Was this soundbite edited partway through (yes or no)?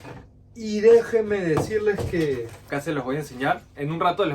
yes